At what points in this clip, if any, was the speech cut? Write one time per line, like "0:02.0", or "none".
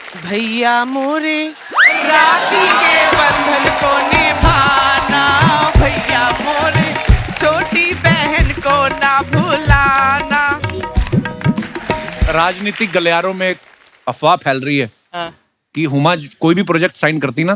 0:12.1